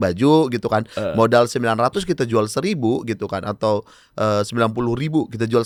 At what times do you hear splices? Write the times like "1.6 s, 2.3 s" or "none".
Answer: none